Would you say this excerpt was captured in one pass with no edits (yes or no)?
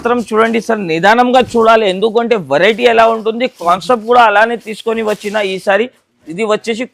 yes